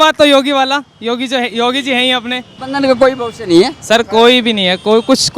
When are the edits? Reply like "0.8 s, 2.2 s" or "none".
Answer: 2.5 s